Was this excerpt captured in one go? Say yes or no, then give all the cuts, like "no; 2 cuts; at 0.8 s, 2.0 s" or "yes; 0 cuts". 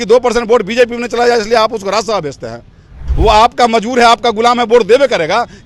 no; 1 cut; at 3.1 s